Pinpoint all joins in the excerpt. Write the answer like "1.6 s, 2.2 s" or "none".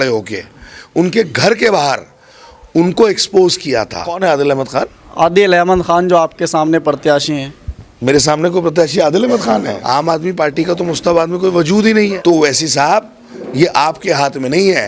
4.0 s, 9.8 s, 12.2 s